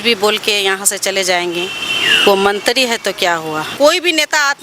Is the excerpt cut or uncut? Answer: cut